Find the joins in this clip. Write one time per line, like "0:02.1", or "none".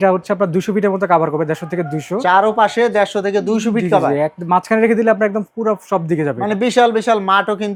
none